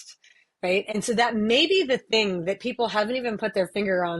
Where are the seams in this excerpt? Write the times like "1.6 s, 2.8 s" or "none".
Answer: 0.9 s